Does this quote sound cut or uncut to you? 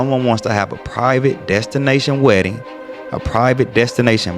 uncut